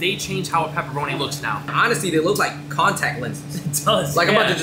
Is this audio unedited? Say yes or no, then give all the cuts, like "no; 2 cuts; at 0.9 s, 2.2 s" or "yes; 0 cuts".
yes; 0 cuts